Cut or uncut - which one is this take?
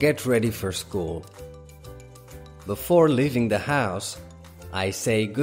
cut